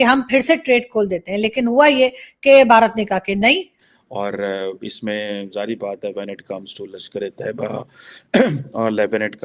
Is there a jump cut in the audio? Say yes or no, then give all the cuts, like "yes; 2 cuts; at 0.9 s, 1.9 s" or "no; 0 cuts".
yes; 1 cut; at 3.8 s